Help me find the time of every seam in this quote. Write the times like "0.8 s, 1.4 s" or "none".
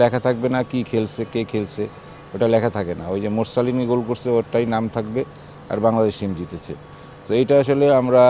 none